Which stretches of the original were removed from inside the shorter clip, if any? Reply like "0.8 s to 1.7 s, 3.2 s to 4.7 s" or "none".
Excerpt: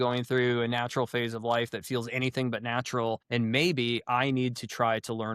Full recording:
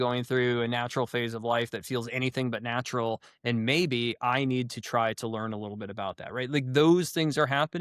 3.2 s to 3.4 s